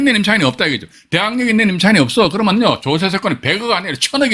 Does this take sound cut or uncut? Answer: uncut